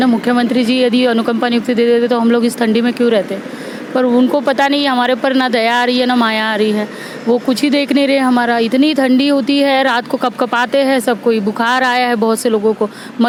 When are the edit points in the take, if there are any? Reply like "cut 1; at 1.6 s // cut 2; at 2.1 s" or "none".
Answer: none